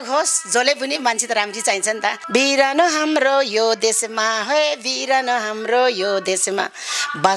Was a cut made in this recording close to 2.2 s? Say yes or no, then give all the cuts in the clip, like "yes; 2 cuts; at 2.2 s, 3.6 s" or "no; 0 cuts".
yes; 1 cut; at 2.2 s